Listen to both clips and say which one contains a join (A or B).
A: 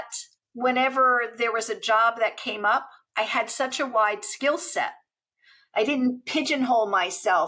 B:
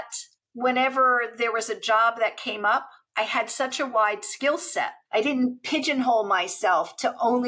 B